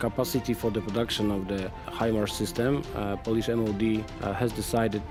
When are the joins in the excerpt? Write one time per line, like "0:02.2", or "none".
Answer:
none